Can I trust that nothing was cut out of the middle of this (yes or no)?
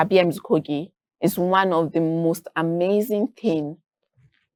yes